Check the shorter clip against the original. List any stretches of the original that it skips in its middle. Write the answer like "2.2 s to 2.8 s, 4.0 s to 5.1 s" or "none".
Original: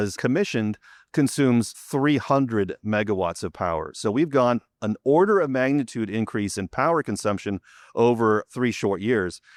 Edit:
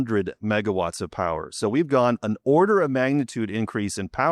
4.6 s to 4.8 s